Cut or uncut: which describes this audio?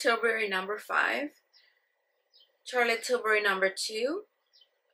uncut